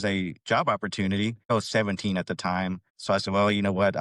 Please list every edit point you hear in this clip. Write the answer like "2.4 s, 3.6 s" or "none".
1.5 s